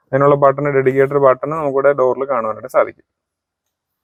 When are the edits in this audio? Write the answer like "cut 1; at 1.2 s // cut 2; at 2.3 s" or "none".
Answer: none

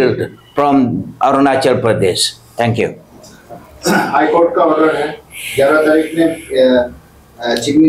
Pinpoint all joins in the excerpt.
none

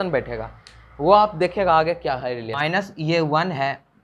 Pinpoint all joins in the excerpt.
cut 1; at 2.6 s

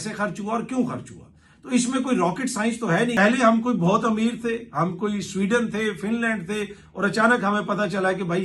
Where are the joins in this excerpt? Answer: cut 1; at 3.2 s

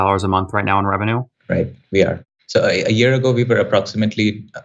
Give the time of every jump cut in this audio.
cut 1; at 1.3 s // cut 2; at 2.3 s

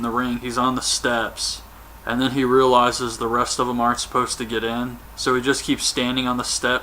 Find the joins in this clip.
cut 1; at 3.5 s

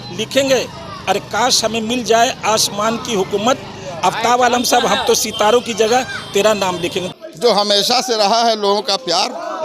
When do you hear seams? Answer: cut 1; at 7.0 s

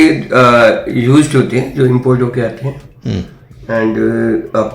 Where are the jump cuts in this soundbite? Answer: none

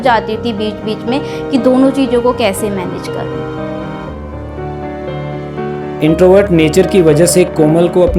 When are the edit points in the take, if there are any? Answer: none

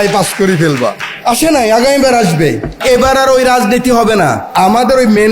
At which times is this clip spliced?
cut 1; at 1.1 s // cut 2; at 2.8 s // cut 3; at 4.5 s

